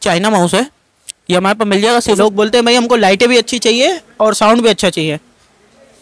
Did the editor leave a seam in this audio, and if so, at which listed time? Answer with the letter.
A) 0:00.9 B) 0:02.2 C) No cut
B